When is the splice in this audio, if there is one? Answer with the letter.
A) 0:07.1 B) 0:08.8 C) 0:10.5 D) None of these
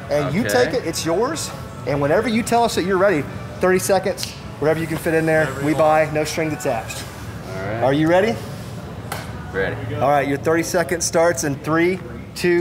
A